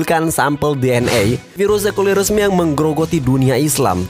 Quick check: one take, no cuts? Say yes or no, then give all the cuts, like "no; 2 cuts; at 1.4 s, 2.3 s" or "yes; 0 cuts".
no; 1 cut; at 1.6 s